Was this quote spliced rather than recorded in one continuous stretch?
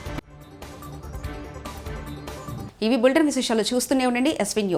no; 0 cuts

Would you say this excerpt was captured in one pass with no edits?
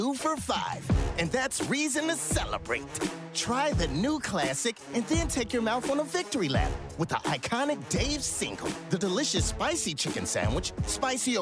yes; 0 cuts

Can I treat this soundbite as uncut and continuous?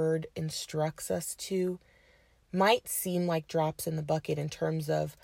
yes; 0 cuts

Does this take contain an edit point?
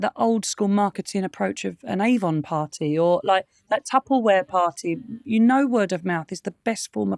no; 0 cuts

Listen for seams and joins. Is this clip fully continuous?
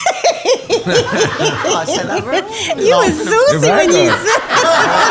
yes; 0 cuts

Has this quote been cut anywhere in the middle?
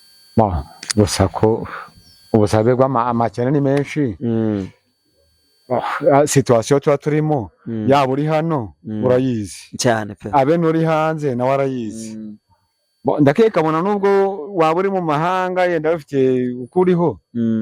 no; 0 cuts

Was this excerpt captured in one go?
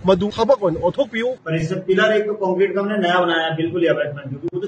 no; 1 cut; at 1.4 s

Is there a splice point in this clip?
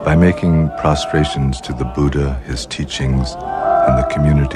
no; 0 cuts

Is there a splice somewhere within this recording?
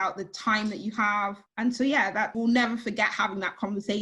yes; 2 cuts; at 1.4 s, 2.3 s

